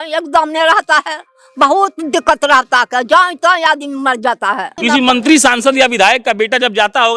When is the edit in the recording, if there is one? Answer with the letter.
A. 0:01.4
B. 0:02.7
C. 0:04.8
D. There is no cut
C